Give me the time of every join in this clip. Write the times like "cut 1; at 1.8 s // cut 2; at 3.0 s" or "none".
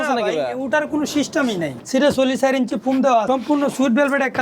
cut 1; at 1.7 s // cut 2; at 3.2 s